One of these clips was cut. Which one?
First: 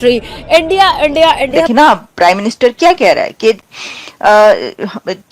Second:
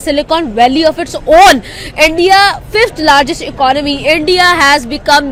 first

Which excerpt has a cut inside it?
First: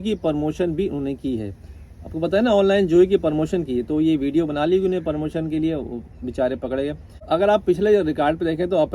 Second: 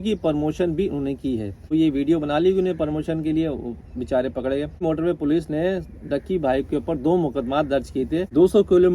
second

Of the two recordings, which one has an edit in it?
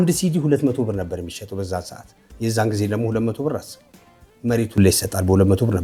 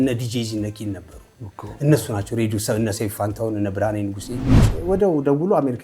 second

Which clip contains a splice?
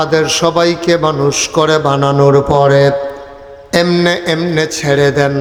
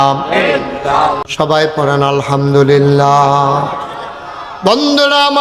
second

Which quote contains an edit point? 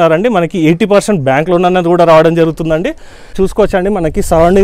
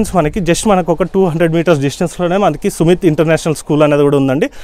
first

